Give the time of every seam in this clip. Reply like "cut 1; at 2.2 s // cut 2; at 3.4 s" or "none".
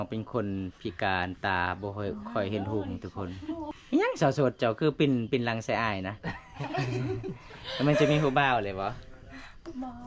cut 1; at 3.7 s